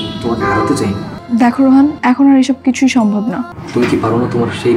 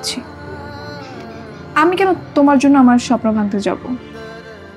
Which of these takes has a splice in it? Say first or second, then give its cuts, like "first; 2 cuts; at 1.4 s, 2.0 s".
first; 3 cuts; at 1.1 s, 2.0 s, 3.6 s